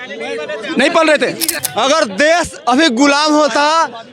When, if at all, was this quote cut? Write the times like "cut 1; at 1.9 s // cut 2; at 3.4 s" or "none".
cut 1; at 1.5 s